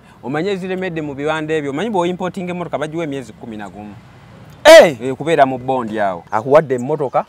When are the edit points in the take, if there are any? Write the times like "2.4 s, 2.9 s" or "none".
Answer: 6.2 s